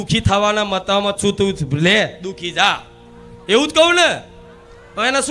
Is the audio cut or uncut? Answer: uncut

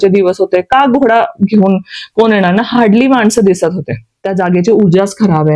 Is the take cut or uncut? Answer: cut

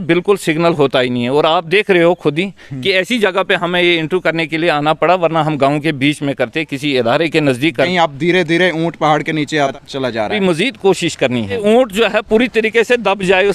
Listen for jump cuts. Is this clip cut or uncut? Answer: cut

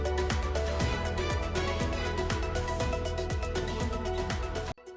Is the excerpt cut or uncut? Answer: cut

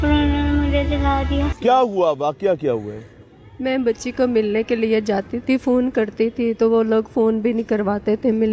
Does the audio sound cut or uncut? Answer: cut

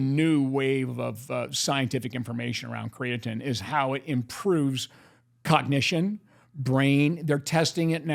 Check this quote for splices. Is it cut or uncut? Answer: uncut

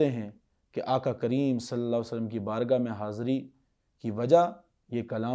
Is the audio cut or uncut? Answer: uncut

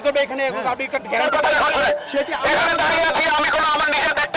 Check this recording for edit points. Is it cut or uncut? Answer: cut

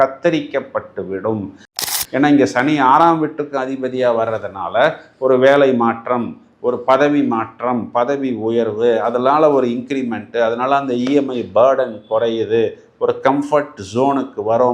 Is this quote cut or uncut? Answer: cut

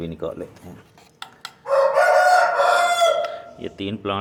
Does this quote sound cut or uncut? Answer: uncut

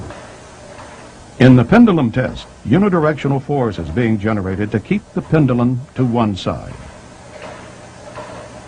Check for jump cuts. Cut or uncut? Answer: cut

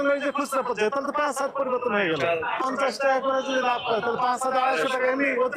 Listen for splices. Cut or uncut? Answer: cut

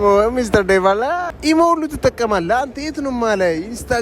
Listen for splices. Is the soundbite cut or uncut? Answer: cut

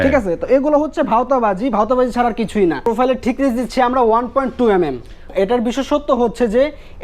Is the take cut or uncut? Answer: cut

